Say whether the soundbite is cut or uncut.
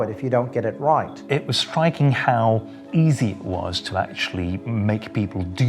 cut